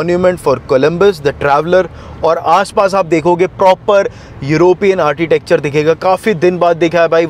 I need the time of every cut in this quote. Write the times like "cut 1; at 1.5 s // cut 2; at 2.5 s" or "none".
none